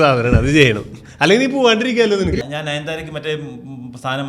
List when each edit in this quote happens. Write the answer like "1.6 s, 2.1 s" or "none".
2.4 s